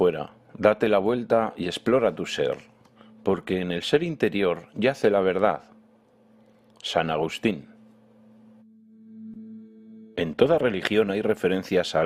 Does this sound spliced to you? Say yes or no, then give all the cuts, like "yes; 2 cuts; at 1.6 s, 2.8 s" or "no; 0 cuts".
yes; 1 cut; at 3.8 s